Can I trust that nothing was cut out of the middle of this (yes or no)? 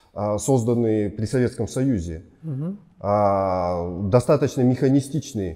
yes